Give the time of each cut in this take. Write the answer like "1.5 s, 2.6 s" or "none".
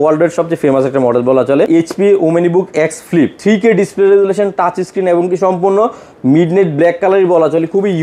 1.7 s, 3.4 s